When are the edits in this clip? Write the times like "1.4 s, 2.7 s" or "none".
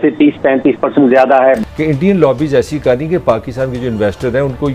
1.6 s